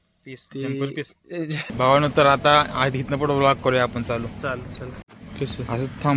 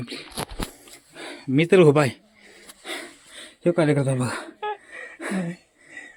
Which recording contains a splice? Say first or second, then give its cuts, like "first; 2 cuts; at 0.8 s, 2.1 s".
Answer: first; 2 cuts; at 1.7 s, 5.1 s